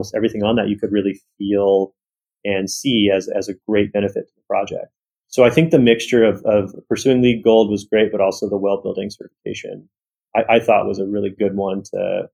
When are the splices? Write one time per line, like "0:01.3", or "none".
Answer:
0:11.3